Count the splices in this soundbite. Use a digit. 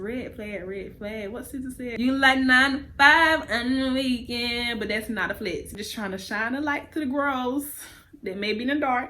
2